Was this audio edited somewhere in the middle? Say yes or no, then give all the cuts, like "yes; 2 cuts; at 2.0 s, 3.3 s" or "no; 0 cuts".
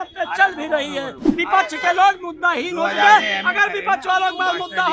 yes; 1 cut; at 1.3 s